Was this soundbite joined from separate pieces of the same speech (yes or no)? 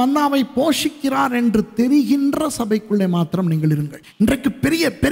yes